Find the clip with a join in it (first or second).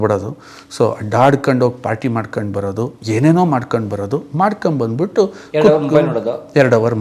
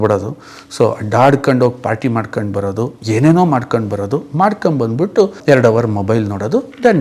second